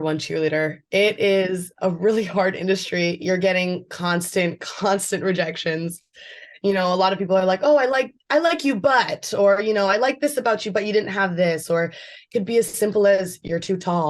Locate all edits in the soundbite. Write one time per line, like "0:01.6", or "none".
none